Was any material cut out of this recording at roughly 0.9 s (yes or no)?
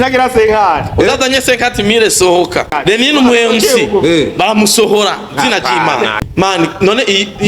no